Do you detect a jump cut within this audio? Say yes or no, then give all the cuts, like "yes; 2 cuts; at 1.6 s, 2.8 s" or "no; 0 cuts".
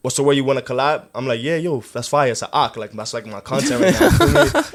no; 0 cuts